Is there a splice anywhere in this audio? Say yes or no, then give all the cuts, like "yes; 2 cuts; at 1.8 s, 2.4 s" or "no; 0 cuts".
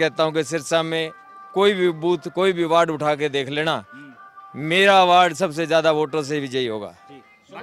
no; 0 cuts